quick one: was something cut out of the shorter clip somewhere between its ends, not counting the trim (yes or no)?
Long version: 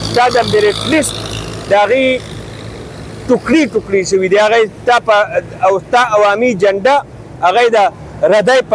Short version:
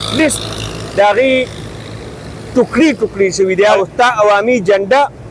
yes